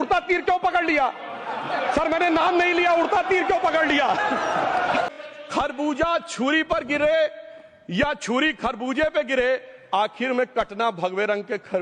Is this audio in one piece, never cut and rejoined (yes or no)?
no